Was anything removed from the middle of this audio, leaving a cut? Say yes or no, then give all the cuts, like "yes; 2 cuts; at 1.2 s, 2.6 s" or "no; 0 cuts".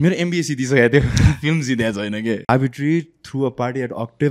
yes; 1 cut; at 2.5 s